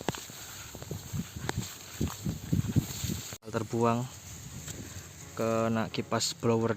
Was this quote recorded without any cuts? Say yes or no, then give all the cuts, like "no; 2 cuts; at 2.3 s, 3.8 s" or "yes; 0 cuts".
no; 1 cut; at 3.5 s